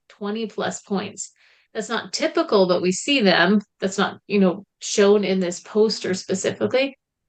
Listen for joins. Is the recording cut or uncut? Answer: uncut